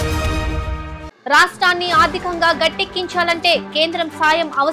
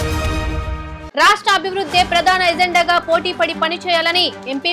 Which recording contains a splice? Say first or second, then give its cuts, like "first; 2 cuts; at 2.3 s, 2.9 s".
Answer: second; 1 cut; at 1.0 s